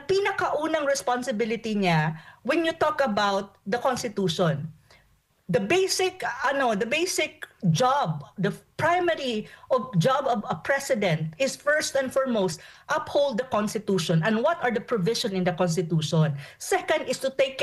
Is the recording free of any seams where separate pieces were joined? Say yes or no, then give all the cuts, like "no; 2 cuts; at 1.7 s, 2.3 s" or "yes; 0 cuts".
yes; 0 cuts